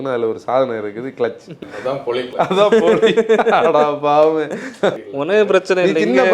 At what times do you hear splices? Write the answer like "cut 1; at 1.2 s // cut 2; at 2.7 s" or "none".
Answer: cut 1; at 1.7 s // cut 2; at 4.9 s